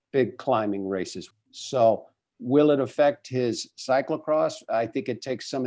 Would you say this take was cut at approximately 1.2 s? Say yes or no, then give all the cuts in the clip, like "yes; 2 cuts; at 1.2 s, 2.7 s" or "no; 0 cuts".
yes; 1 cut; at 1.2 s